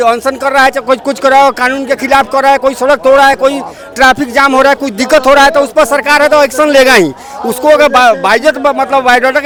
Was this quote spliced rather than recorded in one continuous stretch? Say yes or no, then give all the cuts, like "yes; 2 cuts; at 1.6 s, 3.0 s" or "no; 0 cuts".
no; 0 cuts